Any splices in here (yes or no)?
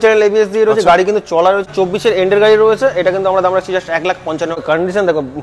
yes